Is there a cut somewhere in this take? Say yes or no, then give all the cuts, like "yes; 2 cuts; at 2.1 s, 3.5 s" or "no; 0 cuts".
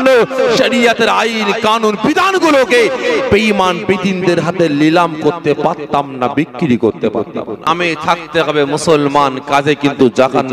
yes; 1 cut; at 7.6 s